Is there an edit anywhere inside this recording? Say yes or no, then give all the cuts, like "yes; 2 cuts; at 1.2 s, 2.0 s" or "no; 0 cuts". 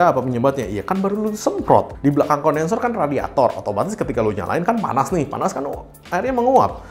no; 0 cuts